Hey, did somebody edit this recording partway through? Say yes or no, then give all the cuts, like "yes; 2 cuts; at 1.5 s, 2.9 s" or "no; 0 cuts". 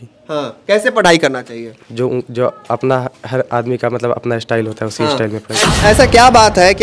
yes; 1 cut; at 5.6 s